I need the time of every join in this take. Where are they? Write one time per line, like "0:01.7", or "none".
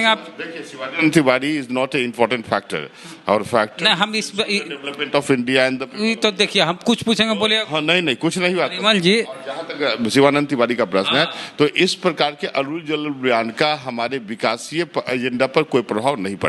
none